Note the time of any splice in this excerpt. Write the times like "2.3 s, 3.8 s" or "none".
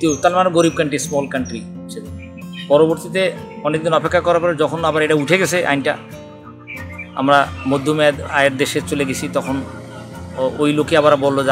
none